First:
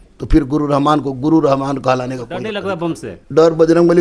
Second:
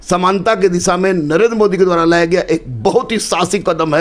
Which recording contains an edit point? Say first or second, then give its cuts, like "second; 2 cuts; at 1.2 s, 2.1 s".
first; 1 cut; at 2.6 s